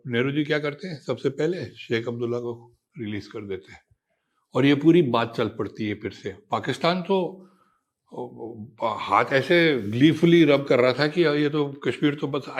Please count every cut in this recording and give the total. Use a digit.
0